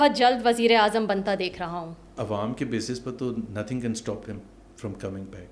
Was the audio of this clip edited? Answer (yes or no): yes